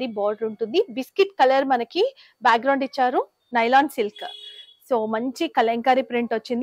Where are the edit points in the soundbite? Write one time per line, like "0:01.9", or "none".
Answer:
0:03.4